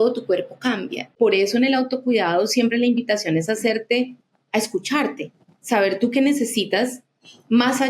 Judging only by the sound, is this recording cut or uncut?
cut